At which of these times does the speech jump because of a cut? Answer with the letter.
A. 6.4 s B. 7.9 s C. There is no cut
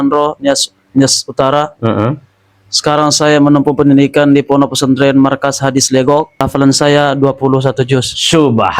A